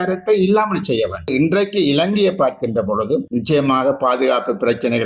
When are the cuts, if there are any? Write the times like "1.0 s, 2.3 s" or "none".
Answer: 1.3 s